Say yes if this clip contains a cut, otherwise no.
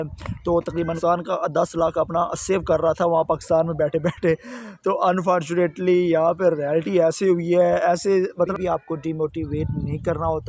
yes